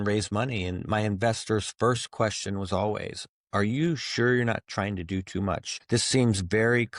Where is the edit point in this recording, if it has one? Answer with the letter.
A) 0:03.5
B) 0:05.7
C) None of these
B